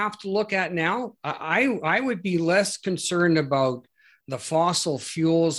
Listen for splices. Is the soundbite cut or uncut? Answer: uncut